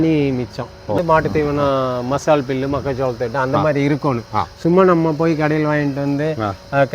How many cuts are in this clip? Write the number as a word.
one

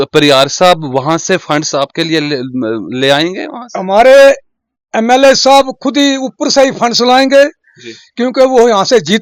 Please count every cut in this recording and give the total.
zero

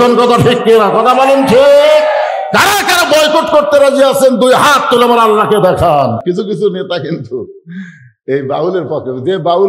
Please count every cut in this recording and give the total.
one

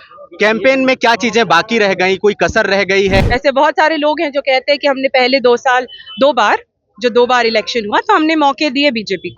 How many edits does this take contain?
one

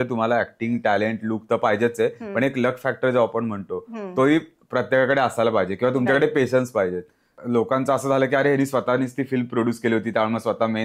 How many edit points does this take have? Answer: one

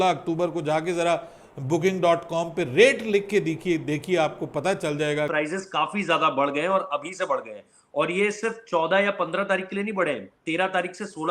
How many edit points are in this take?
one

